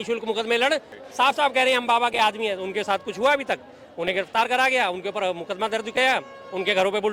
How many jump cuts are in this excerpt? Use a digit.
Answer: 1